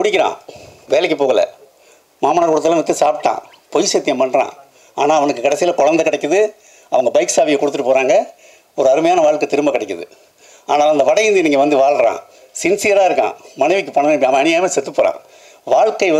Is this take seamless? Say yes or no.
yes